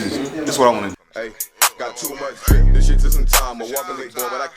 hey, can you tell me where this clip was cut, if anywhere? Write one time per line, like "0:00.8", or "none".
0:01.0